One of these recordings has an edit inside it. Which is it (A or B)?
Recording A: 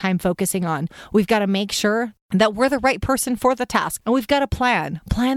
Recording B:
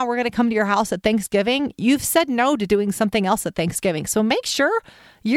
A